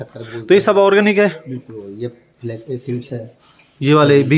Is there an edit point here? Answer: no; 0 cuts

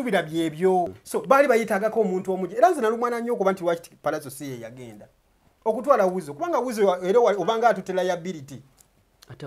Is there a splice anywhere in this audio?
yes; 1 cut; at 1.0 s

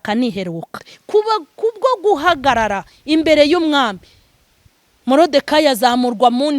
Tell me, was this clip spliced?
yes; 1 cut; at 0.9 s

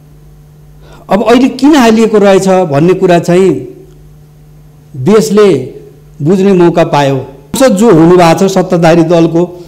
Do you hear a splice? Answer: yes; 1 cut; at 7.6 s

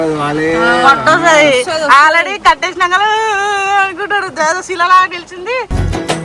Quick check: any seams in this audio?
no; 0 cuts

